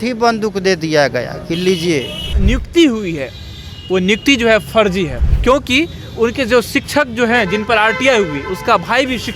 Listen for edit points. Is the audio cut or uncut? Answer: cut